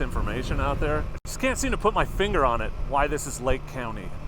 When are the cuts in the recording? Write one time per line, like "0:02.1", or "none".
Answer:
0:01.2
0:02.8